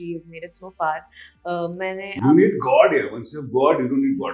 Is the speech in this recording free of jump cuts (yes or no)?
yes